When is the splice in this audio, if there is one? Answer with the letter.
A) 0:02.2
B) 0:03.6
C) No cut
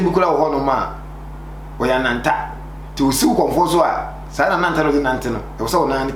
C